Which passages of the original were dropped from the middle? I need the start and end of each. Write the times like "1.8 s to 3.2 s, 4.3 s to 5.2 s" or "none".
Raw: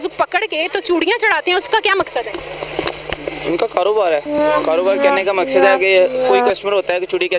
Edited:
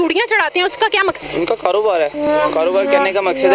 2.1 s to 3.3 s